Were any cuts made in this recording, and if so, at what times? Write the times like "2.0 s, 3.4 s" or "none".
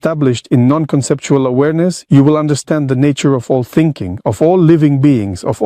none